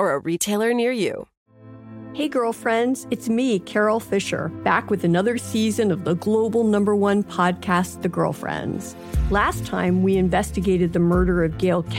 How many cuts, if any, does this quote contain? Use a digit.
1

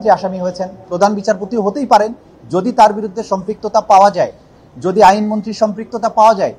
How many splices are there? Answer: 0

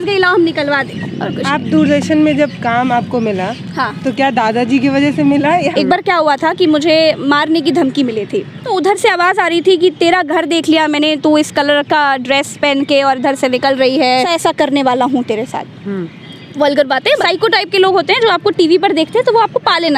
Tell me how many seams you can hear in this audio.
5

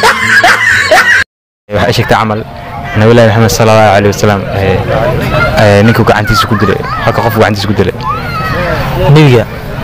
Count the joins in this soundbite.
1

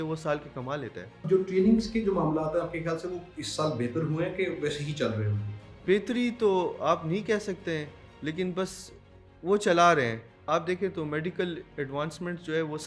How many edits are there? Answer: 4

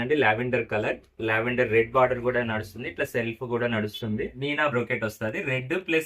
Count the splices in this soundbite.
1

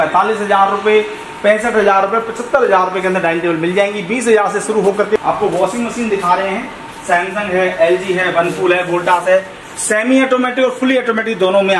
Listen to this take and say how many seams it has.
1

